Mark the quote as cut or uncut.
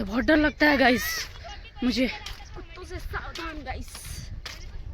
uncut